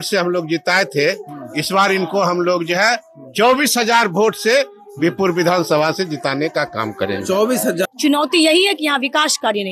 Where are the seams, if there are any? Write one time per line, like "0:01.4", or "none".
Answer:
0:07.9